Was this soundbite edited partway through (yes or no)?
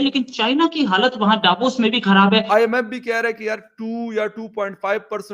yes